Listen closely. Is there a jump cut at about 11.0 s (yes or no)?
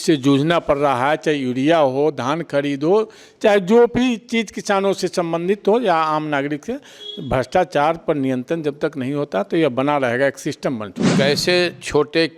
yes